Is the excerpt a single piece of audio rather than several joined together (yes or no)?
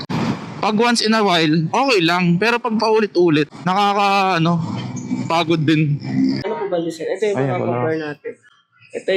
no